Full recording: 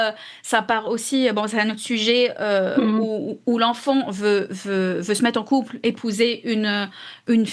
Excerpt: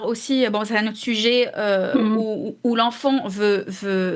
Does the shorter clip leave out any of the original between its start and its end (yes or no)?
no